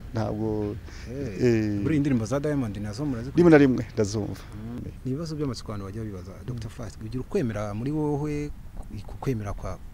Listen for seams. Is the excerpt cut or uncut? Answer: cut